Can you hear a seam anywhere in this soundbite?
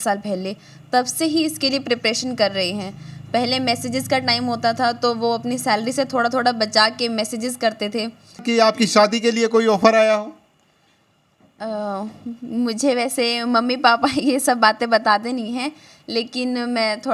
yes; 1 cut; at 8.4 s

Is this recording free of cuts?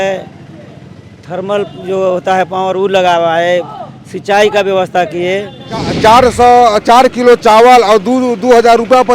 no; 1 cut; at 5.9 s

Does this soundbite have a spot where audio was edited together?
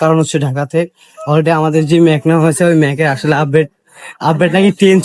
no; 0 cuts

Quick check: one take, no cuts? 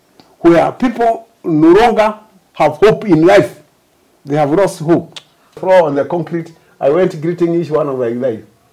no; 1 cut; at 5.6 s

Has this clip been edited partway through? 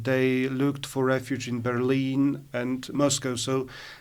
no; 0 cuts

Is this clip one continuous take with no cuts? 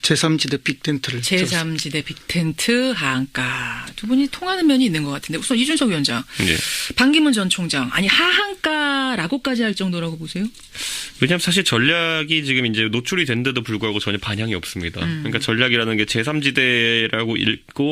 yes; 0 cuts

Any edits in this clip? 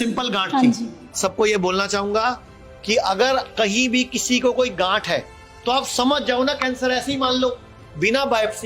yes; 1 cut; at 1.1 s

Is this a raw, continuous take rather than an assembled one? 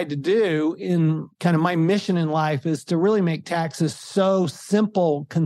no; 1 cut; at 1.3 s

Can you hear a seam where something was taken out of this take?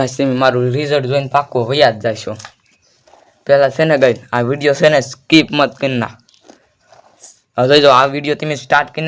no; 0 cuts

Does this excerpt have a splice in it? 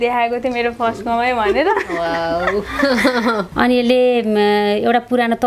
yes; 1 cut; at 3.4 s

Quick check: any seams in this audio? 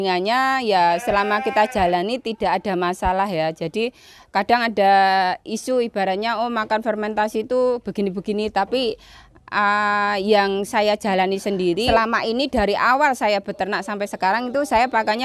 yes; 1 cut; at 11.8 s

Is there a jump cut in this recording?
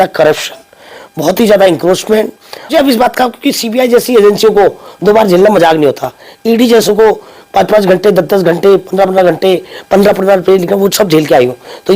yes; 1 cut; at 2.7 s

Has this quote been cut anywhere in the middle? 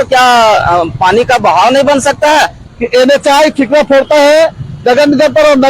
yes; 1 cut; at 2.6 s

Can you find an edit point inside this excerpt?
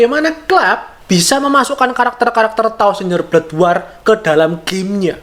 no; 0 cuts

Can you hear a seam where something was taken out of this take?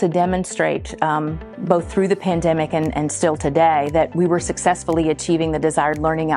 no; 0 cuts

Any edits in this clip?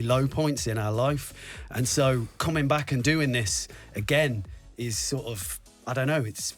no; 0 cuts

